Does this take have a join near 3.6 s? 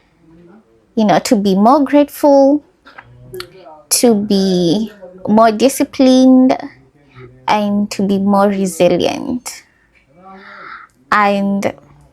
no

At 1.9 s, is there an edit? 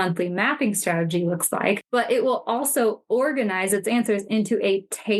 yes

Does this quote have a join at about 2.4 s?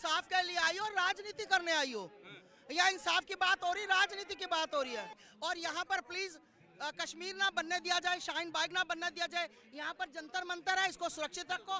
no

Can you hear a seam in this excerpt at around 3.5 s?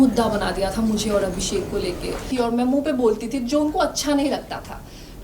no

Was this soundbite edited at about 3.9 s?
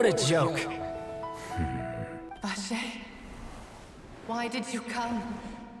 no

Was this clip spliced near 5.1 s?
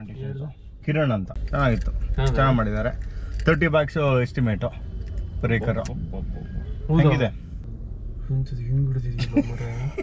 no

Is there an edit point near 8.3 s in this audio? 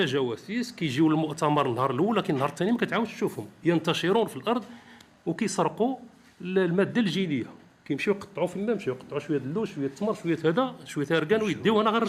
no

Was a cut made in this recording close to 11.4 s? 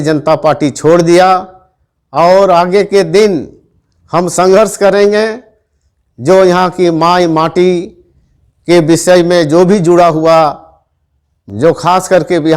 yes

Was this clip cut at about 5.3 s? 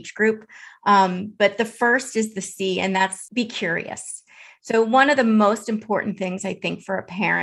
no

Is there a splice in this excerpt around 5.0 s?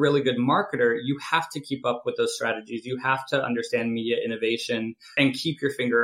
yes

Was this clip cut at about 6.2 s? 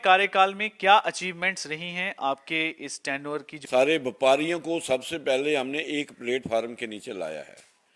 no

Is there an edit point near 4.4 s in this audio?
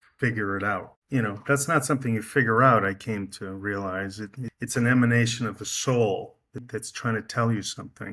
yes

